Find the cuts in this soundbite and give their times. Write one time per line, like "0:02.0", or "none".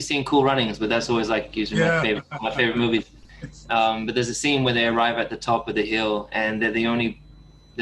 none